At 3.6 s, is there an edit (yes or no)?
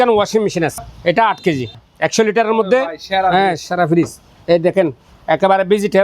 no